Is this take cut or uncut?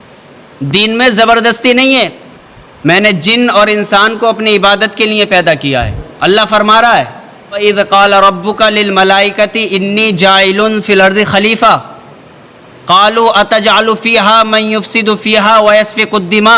cut